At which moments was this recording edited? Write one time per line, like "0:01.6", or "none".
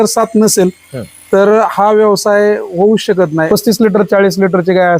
0:03.5

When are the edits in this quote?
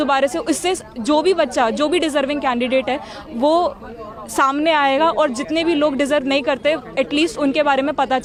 none

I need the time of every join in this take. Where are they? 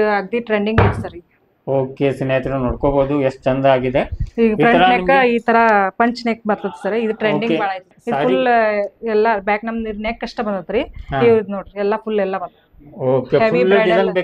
0:07.9

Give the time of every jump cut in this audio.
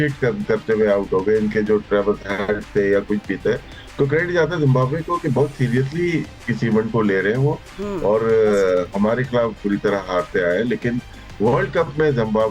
none

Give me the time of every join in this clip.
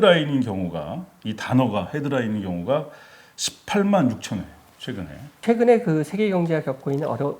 0:05.4

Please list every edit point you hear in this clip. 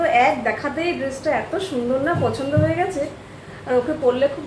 none

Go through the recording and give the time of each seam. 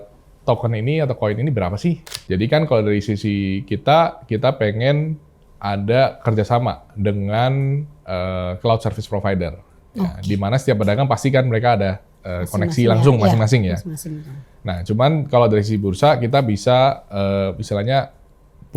0:02.1

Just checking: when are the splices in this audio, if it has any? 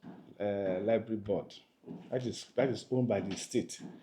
none

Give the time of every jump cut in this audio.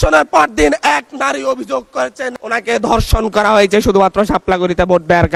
none

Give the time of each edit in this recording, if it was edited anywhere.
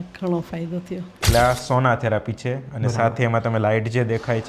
0:01.2

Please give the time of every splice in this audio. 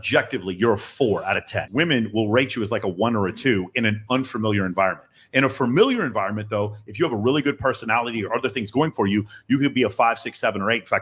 0:01.6

